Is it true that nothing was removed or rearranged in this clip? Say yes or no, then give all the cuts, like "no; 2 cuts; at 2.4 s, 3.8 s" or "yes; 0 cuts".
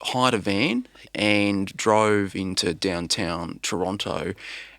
no; 1 cut; at 1.0 s